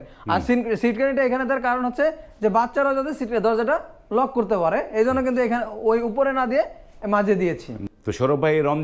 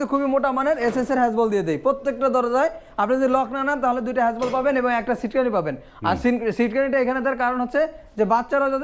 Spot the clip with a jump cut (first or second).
first